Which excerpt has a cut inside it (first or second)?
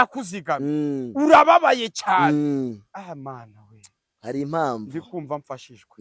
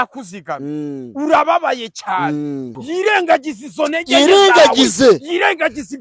second